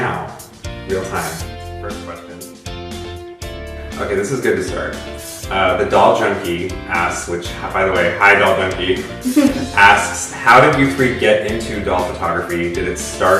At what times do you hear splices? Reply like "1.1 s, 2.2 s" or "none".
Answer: 11.7 s